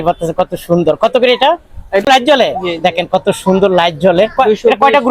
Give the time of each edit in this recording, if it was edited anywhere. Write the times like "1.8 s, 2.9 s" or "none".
2.0 s